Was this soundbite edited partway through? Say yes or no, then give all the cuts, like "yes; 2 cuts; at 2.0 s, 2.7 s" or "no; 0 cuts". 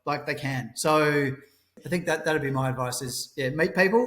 yes; 1 cut; at 1.8 s